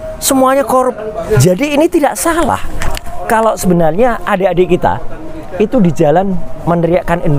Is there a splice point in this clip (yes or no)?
yes